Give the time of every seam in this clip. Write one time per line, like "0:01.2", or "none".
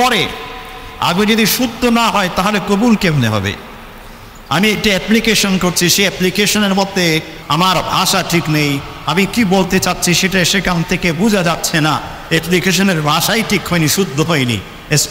0:07.4